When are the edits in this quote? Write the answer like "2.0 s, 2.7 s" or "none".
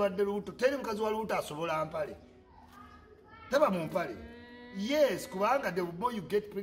none